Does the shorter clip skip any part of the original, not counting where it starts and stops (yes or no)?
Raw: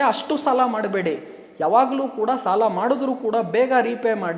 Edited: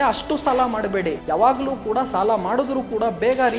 yes